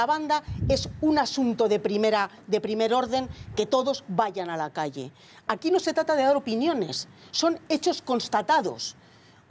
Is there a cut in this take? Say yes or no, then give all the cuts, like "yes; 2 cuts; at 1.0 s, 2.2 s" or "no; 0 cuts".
no; 0 cuts